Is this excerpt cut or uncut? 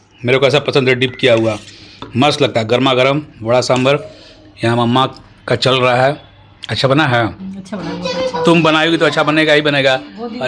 uncut